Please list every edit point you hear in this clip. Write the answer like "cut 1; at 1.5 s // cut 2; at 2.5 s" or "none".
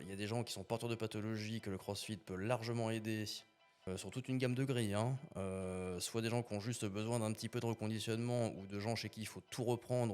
cut 1; at 3.9 s